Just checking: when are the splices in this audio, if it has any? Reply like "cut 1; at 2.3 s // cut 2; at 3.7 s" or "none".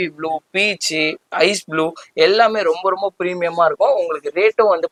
none